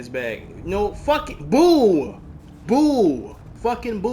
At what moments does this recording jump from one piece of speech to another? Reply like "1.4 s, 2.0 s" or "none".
none